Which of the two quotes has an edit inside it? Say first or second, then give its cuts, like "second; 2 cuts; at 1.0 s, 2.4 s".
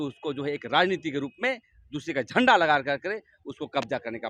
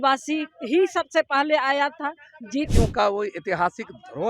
second; 1 cut; at 2.7 s